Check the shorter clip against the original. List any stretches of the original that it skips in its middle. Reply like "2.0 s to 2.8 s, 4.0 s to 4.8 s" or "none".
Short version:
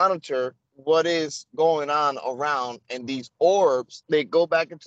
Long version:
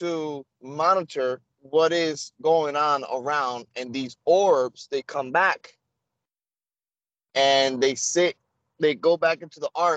4.8 s to 8.6 s